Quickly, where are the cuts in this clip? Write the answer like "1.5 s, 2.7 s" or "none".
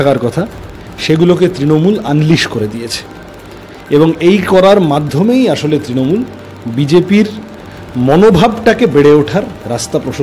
none